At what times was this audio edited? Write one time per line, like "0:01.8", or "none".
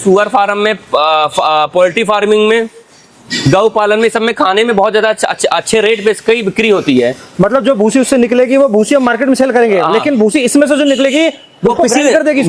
none